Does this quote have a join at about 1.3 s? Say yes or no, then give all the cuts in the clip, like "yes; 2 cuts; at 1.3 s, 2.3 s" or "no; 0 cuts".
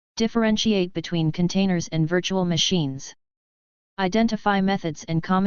yes; 1 cut; at 1.3 s